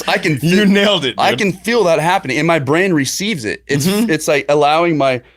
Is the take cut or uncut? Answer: uncut